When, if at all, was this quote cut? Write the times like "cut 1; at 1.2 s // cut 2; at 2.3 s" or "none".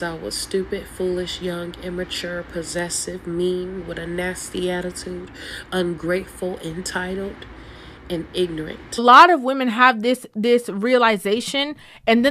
cut 1; at 9.0 s